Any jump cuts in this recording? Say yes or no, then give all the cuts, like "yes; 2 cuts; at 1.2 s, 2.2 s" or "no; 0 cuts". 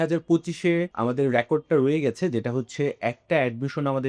yes; 1 cut; at 0.9 s